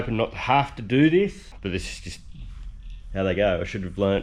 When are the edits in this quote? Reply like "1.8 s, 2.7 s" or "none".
1.5 s